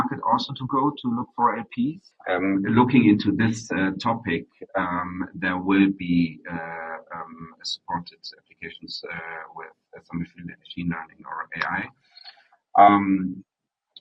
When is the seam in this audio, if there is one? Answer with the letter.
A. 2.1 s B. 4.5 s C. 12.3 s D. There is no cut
A